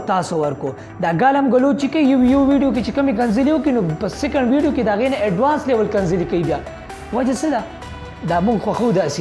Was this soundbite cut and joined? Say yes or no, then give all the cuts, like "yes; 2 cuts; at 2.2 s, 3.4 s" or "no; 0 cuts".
no; 0 cuts